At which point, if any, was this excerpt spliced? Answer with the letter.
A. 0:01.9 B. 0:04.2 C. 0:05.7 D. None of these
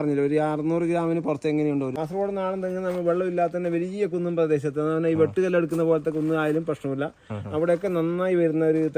A